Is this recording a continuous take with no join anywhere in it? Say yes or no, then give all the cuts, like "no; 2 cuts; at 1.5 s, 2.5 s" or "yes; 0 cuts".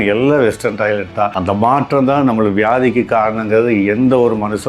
no; 1 cut; at 1.3 s